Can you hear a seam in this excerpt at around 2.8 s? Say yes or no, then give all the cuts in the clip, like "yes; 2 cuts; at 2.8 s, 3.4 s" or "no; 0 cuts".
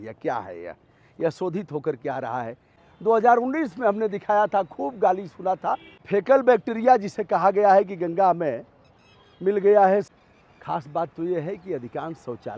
yes; 3 cuts; at 2.8 s, 5.9 s, 10.1 s